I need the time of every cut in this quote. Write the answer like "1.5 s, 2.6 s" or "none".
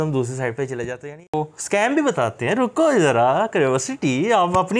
1.3 s